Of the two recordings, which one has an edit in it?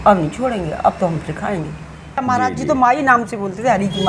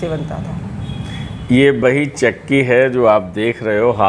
first; 1 cut; at 2.2 s

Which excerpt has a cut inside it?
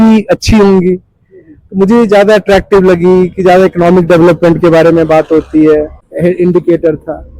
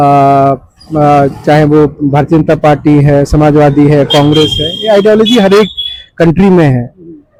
first; 1 cut; at 6.0 s

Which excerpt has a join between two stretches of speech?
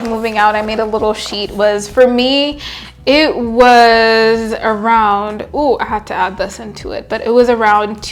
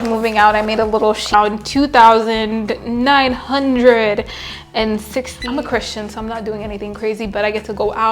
second; 2 cuts; at 1.3 s, 5.4 s

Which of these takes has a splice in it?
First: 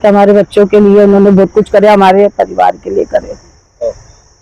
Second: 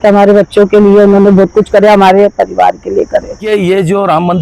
second; 1 cut; at 3.4 s

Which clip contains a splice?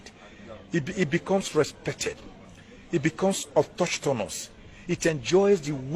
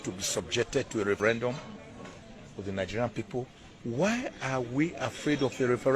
second; 1 cut; at 1.2 s

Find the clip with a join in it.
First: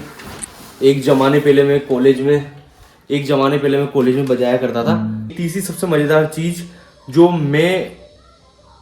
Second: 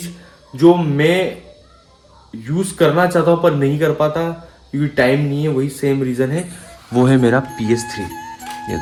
first; 1 cut; at 5.2 s

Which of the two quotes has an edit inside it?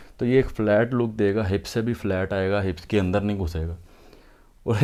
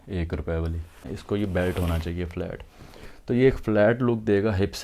second; 1 cut; at 1.1 s

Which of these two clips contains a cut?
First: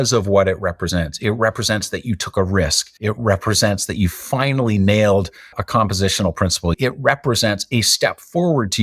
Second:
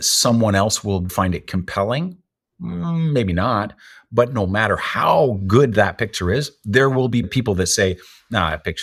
first; 2 cuts; at 2.9 s, 6.7 s

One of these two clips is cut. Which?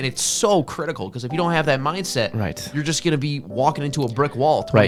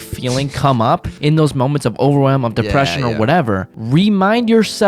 second; 2 cuts; at 1.1 s, 3.7 s

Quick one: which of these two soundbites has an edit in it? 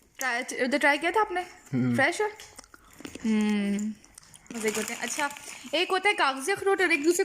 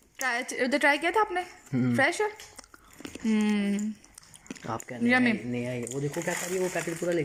first; 1 cut; at 4.6 s

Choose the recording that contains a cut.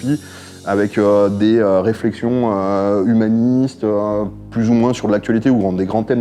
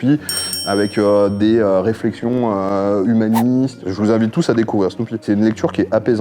second; 2 cuts; at 3.8 s, 5.2 s

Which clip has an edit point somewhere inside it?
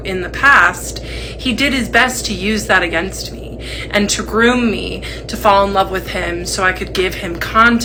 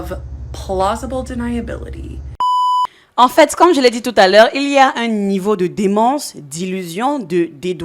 second; 1 cut; at 2.5 s

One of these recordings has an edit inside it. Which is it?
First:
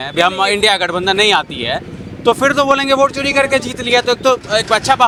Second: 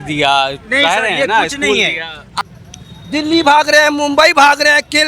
second; 1 cut; at 2.2 s

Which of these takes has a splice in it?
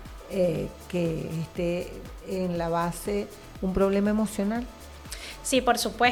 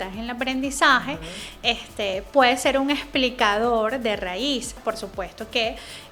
second; 1 cut; at 4.8 s

